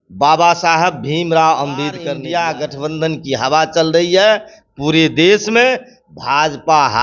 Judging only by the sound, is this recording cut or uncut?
cut